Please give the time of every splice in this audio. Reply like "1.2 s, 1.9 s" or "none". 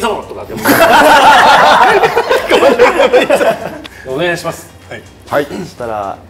none